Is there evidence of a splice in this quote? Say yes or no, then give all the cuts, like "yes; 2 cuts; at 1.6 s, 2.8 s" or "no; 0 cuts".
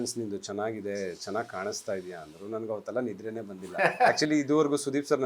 no; 0 cuts